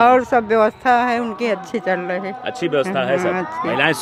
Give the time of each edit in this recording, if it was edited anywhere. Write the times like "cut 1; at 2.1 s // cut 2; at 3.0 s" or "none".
none